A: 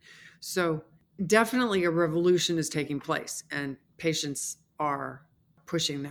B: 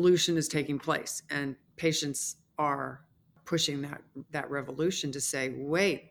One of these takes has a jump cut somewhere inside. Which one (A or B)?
A